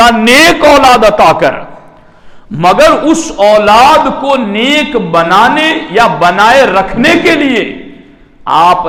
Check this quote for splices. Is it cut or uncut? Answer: uncut